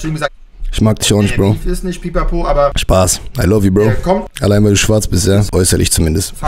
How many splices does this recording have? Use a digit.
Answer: 3